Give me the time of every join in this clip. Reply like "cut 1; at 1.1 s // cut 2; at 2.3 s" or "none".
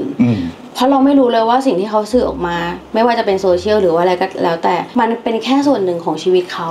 cut 1; at 4.9 s